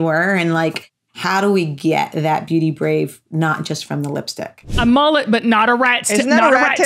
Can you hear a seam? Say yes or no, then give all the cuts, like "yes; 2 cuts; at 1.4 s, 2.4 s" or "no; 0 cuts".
yes; 2 cuts; at 1.1 s, 4.8 s